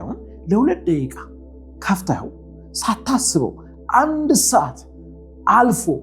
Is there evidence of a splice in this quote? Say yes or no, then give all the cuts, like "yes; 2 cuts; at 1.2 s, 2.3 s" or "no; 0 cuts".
no; 0 cuts